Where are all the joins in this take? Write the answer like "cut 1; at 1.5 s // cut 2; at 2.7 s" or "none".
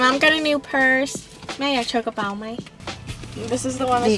cut 1; at 2.9 s